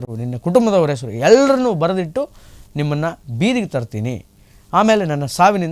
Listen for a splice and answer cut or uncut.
uncut